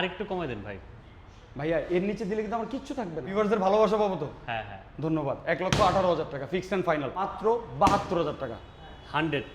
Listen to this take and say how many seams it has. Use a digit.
2